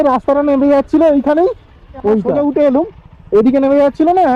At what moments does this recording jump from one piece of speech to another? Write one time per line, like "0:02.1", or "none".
0:02.3